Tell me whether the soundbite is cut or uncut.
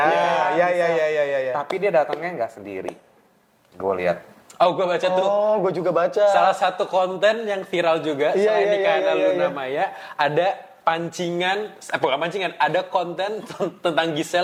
uncut